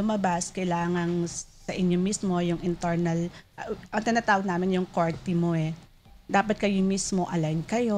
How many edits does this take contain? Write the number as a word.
zero